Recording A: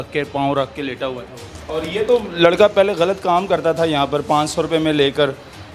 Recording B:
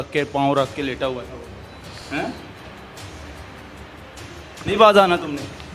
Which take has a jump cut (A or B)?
A